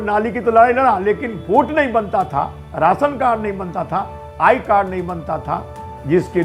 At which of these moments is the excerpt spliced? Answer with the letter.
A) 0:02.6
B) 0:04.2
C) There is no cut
C